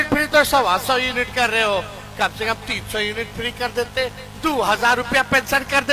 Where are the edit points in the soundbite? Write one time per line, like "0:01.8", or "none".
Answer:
none